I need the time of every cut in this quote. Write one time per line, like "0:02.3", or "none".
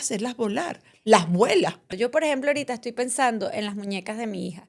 0:01.8